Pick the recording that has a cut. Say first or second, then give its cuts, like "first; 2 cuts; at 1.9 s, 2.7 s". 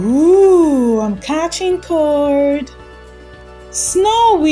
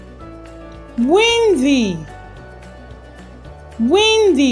second; 1 cut; at 0.9 s